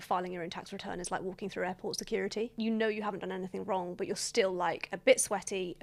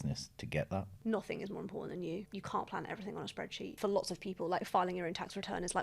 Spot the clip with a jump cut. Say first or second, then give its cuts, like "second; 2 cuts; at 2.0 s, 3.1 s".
second; 2 cuts; at 0.9 s, 3.7 s